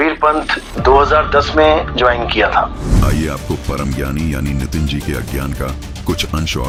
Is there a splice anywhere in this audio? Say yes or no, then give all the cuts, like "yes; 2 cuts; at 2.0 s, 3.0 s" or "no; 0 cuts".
no; 0 cuts